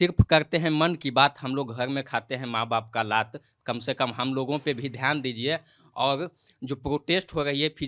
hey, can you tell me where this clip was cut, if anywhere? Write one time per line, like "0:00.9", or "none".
none